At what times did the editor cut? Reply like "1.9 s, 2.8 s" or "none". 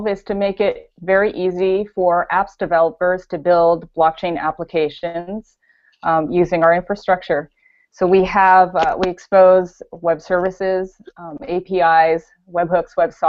7.6 s